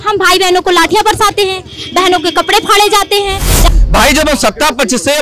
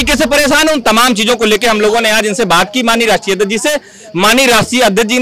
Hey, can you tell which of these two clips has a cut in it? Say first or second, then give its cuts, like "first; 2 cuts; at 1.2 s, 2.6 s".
first; 1 cut; at 3.6 s